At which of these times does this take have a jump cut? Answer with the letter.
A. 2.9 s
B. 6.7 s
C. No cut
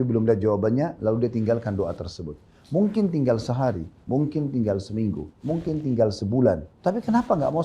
B